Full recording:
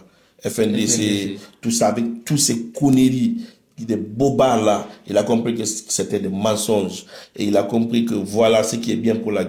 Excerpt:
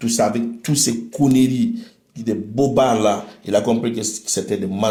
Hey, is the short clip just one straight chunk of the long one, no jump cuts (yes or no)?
yes